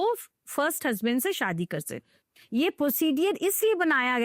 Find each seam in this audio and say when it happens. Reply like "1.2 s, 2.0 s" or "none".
2.1 s